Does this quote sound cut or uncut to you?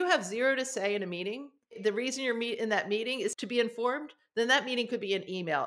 cut